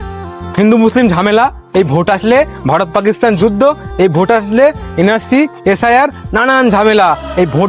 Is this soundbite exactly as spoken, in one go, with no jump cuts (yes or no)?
yes